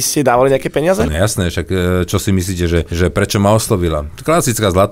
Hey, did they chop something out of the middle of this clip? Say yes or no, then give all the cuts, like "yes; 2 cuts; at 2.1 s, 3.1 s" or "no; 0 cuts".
yes; 2 cuts; at 1.0 s, 2.9 s